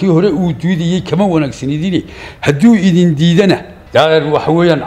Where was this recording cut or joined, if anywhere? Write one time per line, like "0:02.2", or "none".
0:03.7